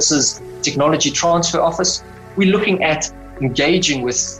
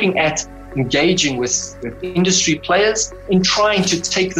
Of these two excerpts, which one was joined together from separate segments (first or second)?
second